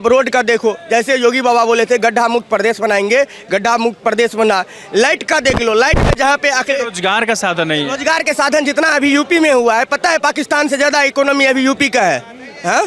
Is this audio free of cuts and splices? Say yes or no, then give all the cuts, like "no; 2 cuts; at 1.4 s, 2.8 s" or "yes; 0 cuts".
yes; 0 cuts